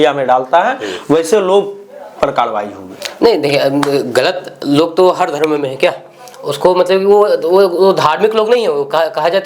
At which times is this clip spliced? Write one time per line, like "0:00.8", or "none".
none